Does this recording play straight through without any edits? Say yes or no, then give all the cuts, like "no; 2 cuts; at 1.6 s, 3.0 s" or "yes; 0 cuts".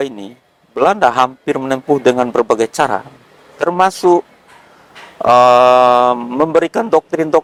yes; 0 cuts